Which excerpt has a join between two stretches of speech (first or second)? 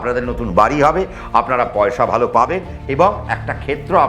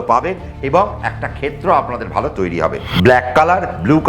second